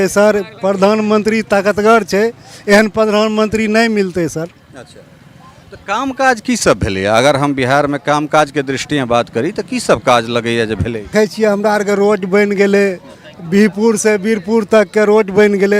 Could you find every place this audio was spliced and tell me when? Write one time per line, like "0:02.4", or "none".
0:11.1